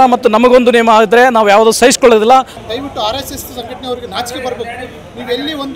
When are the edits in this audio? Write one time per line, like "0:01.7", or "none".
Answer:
0:02.6